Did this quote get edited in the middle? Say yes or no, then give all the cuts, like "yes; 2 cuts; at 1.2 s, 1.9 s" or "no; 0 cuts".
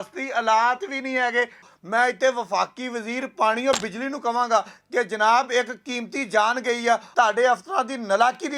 yes; 2 cuts; at 1.7 s, 7.1 s